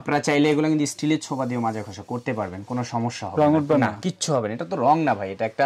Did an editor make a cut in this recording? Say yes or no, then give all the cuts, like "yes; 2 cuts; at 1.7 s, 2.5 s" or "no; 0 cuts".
no; 0 cuts